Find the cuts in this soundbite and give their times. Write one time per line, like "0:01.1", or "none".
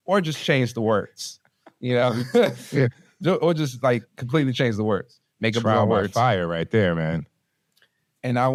none